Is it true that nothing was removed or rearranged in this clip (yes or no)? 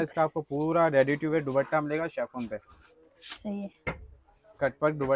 yes